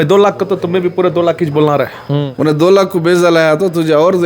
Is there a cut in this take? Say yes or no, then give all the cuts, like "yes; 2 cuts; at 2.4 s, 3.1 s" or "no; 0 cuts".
yes; 1 cut; at 2.2 s